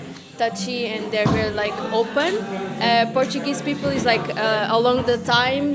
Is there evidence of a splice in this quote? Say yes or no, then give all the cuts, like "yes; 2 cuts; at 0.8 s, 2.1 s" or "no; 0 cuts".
no; 0 cuts